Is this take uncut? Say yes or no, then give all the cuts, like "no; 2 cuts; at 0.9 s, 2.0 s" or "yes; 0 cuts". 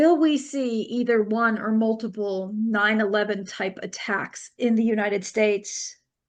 yes; 0 cuts